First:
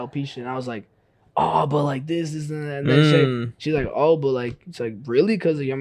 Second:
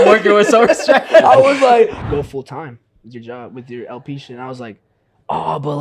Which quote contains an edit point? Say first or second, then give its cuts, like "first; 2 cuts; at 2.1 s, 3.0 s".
second; 1 cut; at 2.0 s